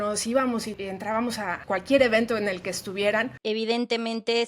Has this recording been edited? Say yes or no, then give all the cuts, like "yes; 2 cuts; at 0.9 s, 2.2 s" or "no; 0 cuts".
yes; 3 cuts; at 0.8 s, 1.6 s, 3.3 s